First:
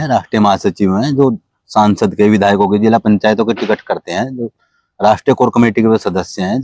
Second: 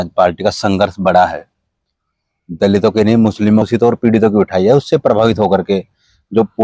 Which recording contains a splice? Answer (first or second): second